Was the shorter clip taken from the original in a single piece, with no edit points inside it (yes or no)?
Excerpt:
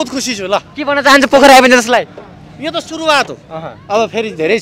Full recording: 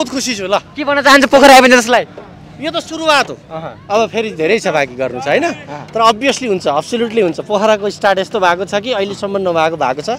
yes